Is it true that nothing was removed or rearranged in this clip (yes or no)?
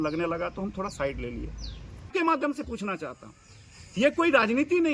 no